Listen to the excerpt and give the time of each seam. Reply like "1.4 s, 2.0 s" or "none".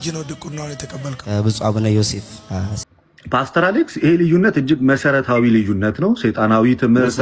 2.8 s